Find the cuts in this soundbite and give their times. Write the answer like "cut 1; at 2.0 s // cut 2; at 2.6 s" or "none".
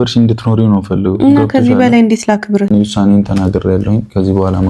cut 1; at 2.7 s